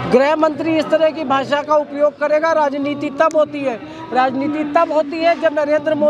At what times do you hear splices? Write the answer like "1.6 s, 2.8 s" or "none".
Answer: none